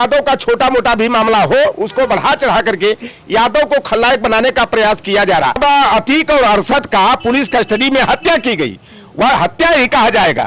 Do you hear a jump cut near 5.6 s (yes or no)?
yes